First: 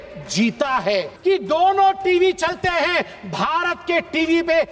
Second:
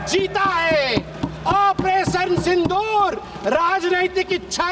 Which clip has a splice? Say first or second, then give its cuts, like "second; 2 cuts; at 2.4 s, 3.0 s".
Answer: first; 1 cut; at 1.1 s